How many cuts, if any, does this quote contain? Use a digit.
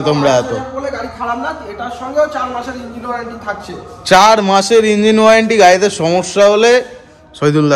0